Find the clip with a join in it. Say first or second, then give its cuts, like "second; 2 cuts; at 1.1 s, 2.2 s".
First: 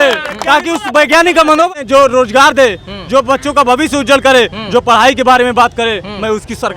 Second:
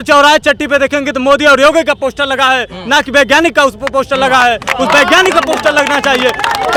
first; 1 cut; at 1.8 s